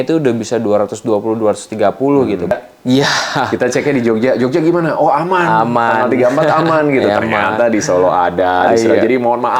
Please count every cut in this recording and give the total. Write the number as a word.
one